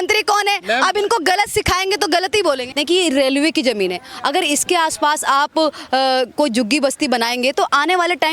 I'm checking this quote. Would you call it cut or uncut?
cut